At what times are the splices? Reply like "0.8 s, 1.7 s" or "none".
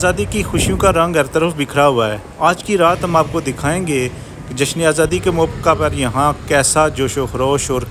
none